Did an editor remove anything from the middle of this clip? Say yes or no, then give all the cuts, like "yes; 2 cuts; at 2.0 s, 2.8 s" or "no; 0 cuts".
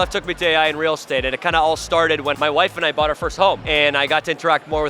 yes; 2 cuts; at 2.4 s, 3.6 s